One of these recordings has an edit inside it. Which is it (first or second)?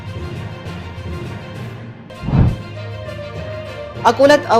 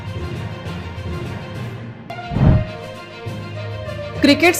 first